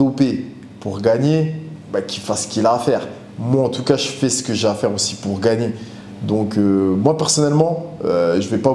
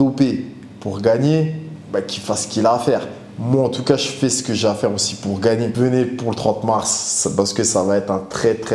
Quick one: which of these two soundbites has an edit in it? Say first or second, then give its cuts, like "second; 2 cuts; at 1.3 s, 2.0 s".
second; 1 cut; at 5.7 s